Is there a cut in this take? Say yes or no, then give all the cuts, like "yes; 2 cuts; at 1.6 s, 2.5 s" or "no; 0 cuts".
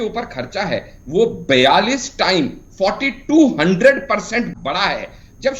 yes; 1 cut; at 4.5 s